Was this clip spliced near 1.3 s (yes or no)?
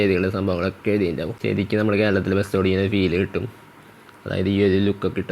yes